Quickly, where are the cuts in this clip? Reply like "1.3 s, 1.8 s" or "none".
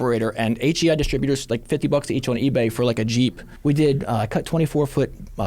3.5 s